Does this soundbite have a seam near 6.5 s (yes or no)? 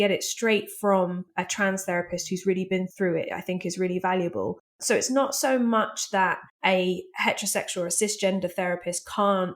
yes